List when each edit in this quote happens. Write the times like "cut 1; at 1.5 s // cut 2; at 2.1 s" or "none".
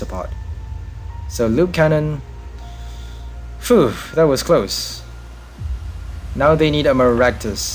none